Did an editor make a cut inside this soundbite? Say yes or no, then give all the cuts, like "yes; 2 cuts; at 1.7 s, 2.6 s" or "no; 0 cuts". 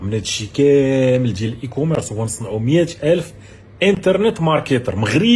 no; 0 cuts